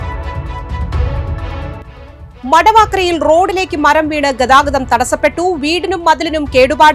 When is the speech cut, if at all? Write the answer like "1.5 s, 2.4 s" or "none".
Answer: 2.0 s